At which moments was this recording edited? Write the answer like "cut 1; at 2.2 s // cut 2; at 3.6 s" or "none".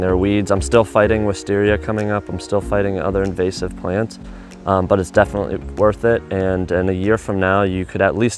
none

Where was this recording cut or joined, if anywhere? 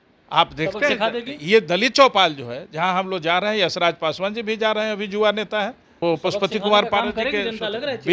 cut 1; at 5.8 s

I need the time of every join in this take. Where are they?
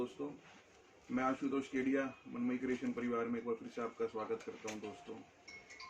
none

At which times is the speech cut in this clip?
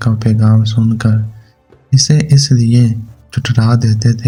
none

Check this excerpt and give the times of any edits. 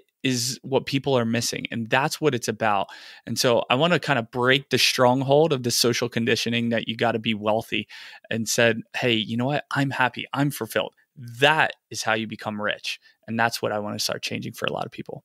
none

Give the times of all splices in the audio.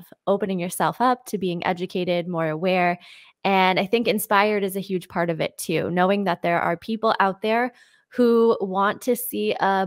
none

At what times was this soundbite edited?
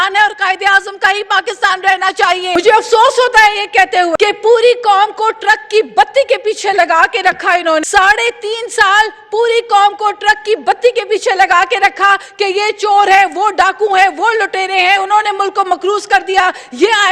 cut 1; at 2.6 s // cut 2; at 4.1 s // cut 3; at 7.8 s

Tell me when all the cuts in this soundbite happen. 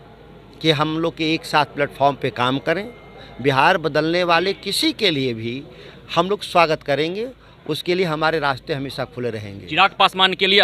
none

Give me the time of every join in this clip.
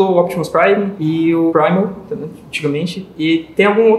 cut 1; at 1.0 s

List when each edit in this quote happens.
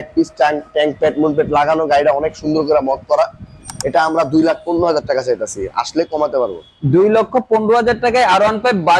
none

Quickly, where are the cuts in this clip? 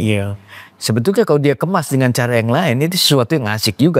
none

